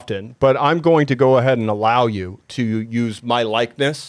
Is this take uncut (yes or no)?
yes